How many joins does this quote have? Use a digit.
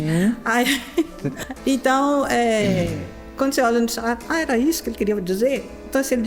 1